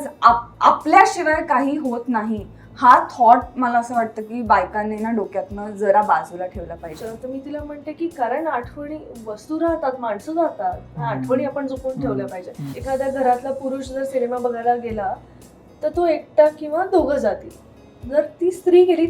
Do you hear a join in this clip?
yes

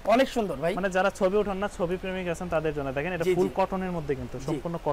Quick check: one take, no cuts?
yes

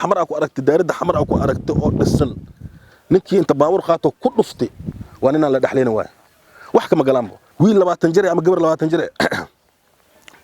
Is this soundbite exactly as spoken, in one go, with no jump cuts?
no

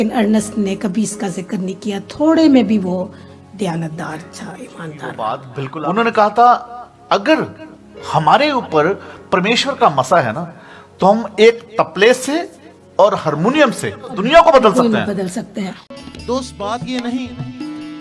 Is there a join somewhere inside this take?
yes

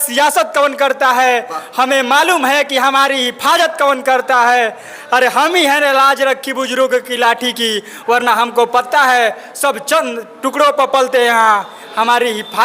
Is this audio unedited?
yes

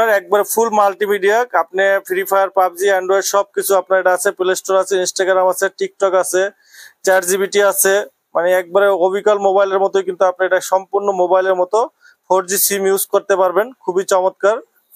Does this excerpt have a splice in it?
no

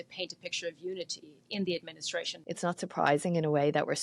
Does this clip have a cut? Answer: yes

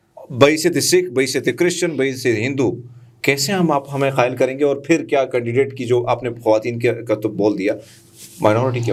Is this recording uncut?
yes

